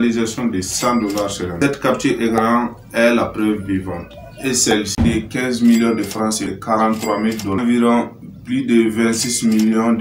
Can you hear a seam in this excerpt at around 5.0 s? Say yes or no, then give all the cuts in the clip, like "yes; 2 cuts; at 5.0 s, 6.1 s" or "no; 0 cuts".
yes; 3 cuts; at 1.5 s, 5.0 s, 6.5 s